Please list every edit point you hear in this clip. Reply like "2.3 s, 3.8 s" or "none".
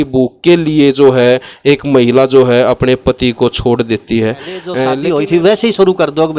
4.9 s